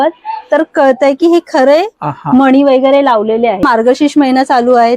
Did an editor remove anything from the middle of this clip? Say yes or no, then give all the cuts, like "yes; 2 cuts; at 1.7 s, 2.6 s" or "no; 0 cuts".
yes; 1 cut; at 3.6 s